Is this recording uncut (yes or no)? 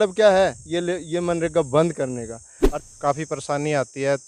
no